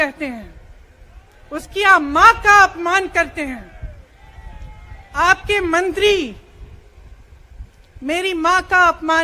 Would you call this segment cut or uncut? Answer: uncut